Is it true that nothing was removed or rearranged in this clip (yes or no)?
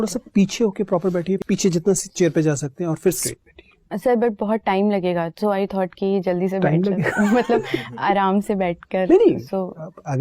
no